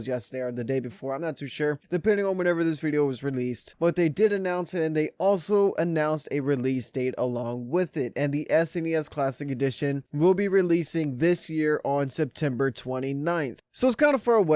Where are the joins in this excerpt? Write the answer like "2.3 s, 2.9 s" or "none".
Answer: 5.1 s